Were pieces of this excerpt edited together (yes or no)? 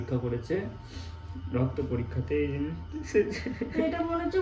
no